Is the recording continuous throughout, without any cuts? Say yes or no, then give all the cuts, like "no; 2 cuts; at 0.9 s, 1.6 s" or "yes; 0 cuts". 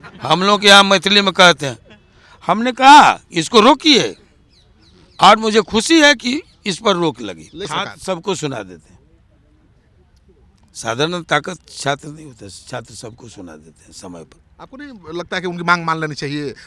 no; 1 cut; at 7.7 s